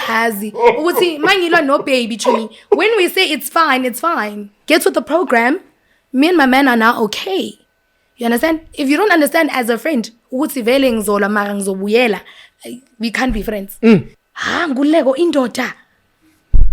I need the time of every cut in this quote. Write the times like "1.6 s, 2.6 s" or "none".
14.1 s